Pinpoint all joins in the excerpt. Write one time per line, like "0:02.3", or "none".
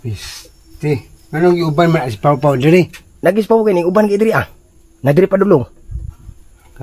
0:03.0